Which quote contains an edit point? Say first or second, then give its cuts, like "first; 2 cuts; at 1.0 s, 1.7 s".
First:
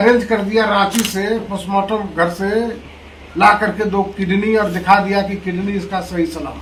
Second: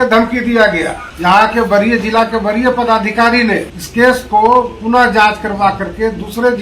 second; 2 cuts; at 1.0 s, 3.8 s